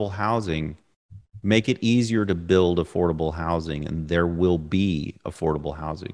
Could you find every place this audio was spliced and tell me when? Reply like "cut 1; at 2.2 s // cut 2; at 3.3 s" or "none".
none